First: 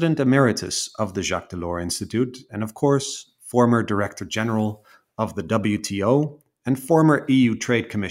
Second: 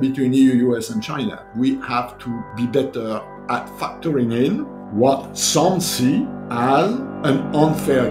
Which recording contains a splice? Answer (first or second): second